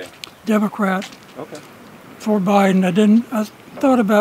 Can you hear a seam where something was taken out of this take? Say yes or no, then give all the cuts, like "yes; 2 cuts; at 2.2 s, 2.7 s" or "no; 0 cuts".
no; 0 cuts